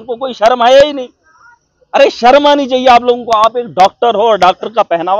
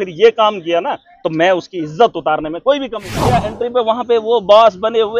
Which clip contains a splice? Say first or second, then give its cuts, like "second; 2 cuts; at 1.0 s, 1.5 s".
second; 1 cut; at 3.5 s